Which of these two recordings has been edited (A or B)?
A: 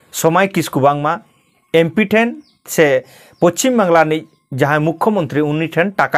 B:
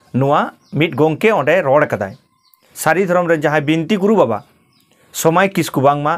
B